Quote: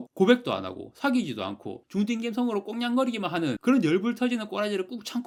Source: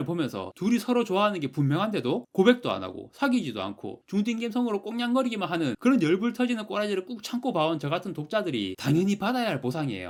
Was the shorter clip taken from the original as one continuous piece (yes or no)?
yes